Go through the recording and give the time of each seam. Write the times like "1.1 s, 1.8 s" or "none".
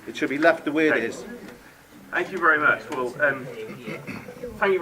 1.3 s